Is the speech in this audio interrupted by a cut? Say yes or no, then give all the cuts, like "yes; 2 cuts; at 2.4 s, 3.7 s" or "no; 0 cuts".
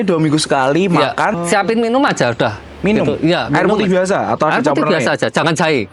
yes; 1 cut; at 1.3 s